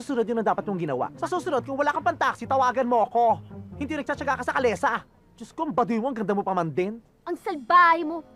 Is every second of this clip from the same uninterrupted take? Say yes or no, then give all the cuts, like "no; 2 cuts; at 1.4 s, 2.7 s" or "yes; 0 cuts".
no; 1 cut; at 1.1 s